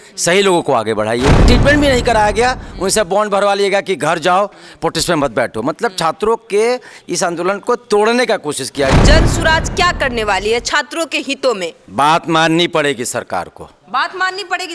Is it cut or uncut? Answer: cut